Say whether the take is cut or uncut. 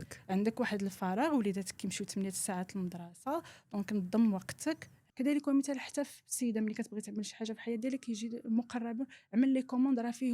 cut